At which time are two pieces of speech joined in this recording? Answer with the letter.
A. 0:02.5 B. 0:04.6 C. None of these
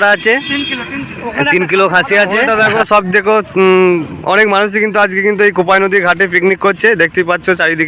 A